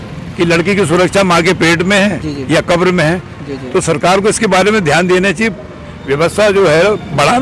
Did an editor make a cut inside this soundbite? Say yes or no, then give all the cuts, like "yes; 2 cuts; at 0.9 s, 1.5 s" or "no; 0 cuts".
no; 0 cuts